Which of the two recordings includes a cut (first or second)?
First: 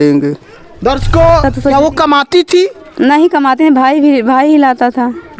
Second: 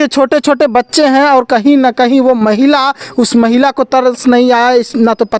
first